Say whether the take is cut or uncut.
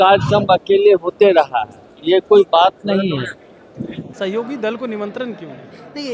cut